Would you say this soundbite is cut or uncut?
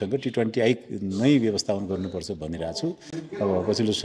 uncut